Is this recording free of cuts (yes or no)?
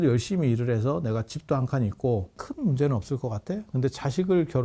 no